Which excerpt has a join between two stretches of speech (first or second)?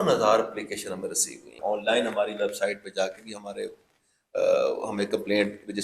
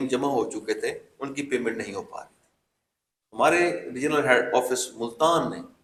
first